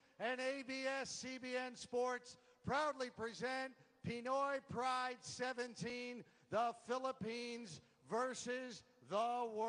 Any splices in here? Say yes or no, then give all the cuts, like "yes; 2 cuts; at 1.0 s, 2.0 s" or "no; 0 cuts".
no; 0 cuts